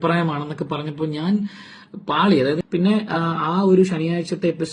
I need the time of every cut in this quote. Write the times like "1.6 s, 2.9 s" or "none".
2.6 s